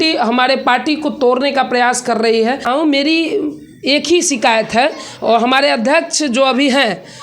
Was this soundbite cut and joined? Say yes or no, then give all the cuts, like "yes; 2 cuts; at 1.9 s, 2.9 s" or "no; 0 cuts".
yes; 1 cut; at 2.7 s